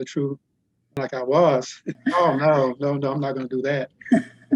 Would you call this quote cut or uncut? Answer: cut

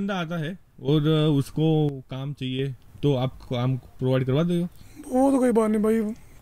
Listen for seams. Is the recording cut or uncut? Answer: uncut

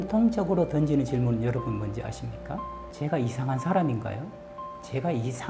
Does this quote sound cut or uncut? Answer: cut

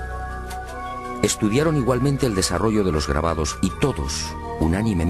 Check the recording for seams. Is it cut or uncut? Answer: uncut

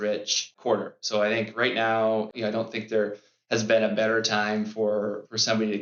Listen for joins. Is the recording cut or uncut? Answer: uncut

